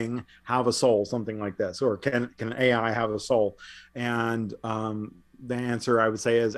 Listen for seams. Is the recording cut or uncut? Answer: uncut